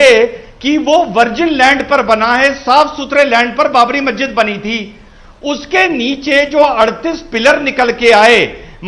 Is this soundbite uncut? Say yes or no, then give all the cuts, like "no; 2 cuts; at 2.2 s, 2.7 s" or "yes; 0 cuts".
yes; 0 cuts